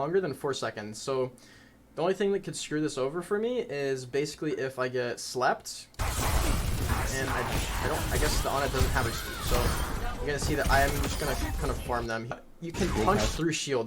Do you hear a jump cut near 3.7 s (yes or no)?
no